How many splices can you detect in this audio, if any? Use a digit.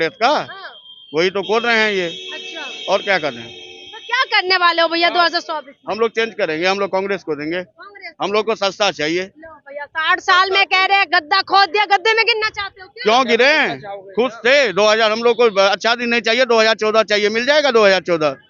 0